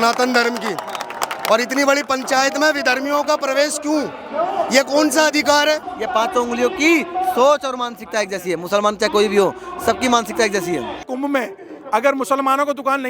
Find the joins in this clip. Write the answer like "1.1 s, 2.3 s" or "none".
5.9 s, 11.1 s